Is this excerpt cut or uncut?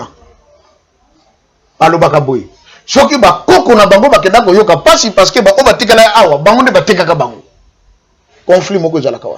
uncut